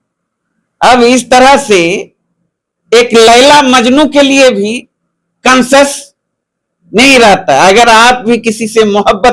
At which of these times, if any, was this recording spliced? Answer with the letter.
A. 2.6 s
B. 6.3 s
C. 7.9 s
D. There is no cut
D